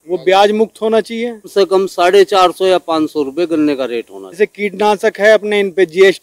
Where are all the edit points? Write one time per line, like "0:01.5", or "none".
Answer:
0:01.5
0:04.4